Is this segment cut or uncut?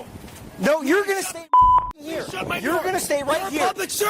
cut